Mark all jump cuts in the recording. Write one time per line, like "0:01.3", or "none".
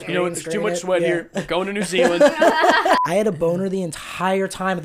0:03.0